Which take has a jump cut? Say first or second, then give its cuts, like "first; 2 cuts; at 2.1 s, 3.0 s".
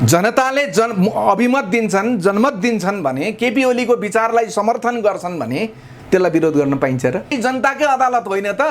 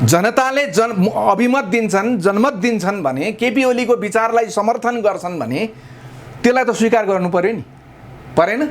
first; 2 cuts; at 5.9 s, 7.3 s